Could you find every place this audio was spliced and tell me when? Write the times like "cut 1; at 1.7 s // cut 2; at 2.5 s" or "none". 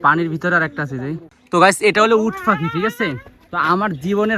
cut 1; at 1.3 s